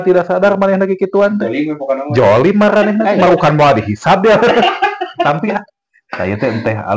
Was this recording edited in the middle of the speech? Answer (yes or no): yes